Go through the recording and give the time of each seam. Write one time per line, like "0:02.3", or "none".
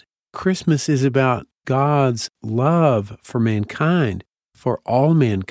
none